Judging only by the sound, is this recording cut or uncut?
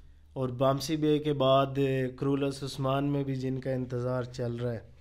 uncut